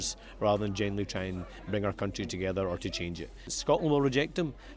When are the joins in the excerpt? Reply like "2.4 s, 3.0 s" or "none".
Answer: 3.5 s